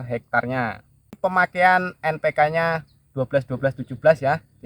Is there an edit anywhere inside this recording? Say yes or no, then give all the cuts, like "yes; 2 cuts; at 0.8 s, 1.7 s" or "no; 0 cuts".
yes; 1 cut; at 1.2 s